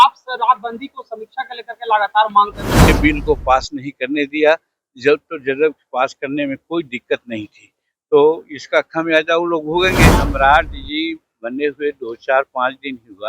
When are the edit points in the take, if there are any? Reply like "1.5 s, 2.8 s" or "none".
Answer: 2.9 s, 10.1 s